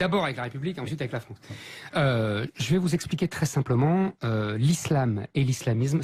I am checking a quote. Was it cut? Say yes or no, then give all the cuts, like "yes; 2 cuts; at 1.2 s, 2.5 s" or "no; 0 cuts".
yes; 1 cut; at 1.6 s